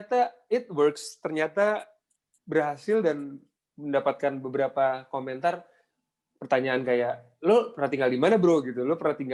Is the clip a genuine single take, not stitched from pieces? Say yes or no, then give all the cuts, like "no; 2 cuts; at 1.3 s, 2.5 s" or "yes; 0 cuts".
yes; 0 cuts